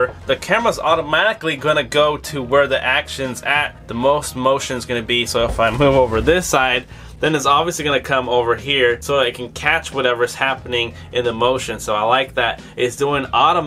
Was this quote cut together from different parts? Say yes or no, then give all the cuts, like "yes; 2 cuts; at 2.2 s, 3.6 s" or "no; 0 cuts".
no; 0 cuts